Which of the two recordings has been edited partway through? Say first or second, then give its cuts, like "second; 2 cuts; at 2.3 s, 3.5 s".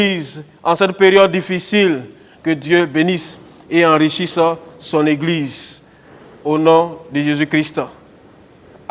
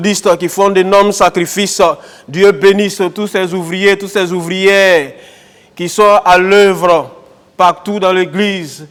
first; 1 cut; at 2.3 s